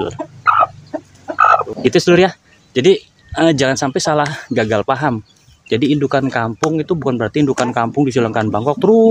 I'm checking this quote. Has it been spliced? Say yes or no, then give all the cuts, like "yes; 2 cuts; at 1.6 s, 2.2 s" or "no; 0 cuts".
yes; 1 cut; at 1.7 s